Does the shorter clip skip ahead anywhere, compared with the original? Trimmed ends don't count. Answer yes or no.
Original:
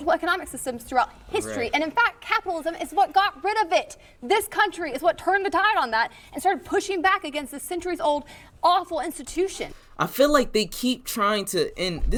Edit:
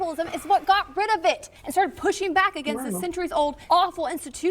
yes